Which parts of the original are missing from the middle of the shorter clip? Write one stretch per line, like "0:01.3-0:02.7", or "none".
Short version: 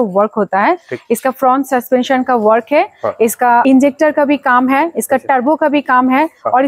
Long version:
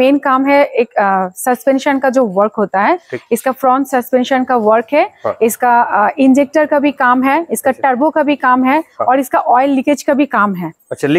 0:05.8-0:06.2